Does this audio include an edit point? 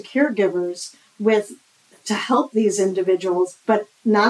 no; 0 cuts

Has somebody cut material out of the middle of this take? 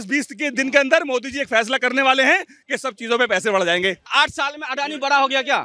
yes; 1 cut; at 4.0 s

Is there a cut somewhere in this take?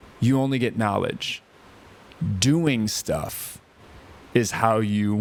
no; 0 cuts

